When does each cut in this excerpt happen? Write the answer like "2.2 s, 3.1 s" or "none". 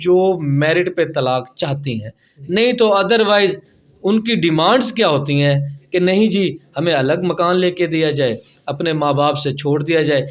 none